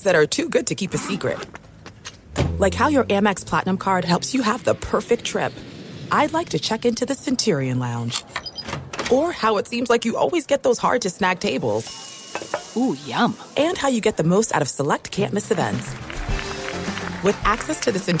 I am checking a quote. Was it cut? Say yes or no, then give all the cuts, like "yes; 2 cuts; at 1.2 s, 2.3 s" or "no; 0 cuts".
no; 0 cuts